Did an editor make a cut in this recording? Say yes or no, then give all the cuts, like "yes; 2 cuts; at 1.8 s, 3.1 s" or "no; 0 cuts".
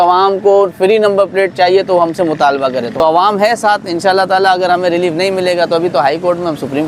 yes; 1 cut; at 2.9 s